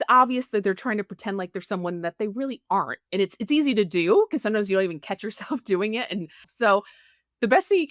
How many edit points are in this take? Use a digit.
1